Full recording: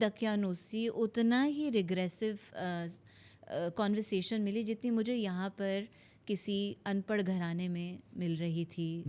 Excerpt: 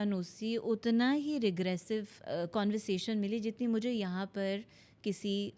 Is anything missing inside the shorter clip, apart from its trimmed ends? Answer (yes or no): yes